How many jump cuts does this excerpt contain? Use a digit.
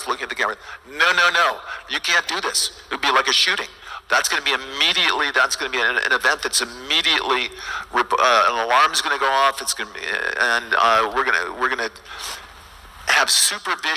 1